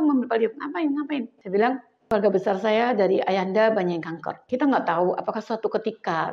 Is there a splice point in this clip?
yes; 3 cuts; at 1.4 s, 1.9 s, 4.3 s

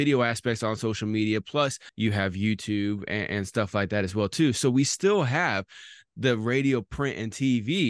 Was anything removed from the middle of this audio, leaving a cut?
yes; 1 cut; at 1.8 s

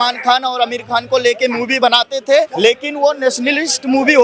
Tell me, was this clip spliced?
yes; 1 cut; at 2.5 s

